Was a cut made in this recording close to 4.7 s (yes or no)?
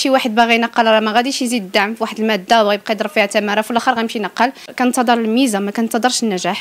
yes